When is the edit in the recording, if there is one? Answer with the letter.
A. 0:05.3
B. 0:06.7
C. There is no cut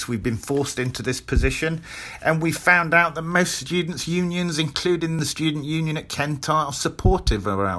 A